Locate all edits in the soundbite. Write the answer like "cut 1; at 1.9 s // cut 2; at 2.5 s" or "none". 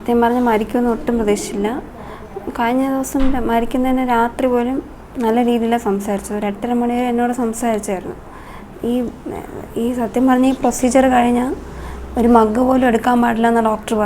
none